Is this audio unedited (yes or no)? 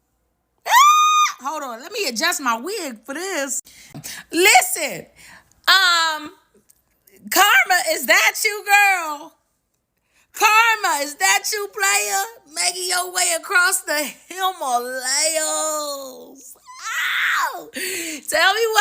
no